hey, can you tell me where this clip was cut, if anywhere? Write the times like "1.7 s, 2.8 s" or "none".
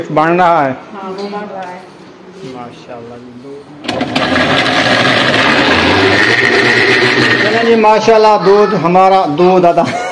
3.4 s, 7.6 s